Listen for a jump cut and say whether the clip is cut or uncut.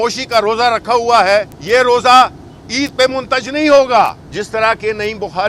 cut